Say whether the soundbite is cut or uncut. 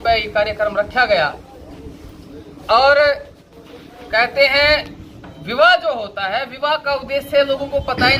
uncut